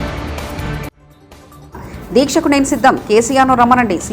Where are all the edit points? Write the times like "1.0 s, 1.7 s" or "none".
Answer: 1.0 s